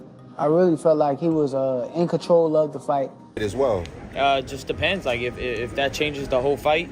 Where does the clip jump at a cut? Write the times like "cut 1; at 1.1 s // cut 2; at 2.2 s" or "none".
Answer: cut 1; at 3.4 s